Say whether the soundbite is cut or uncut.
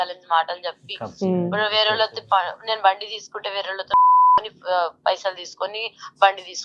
uncut